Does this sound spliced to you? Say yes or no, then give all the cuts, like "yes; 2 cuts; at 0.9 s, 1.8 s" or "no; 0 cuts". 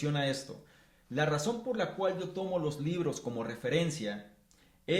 no; 0 cuts